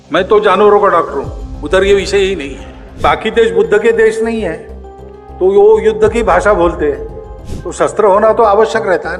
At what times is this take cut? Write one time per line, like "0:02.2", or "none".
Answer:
0:03.0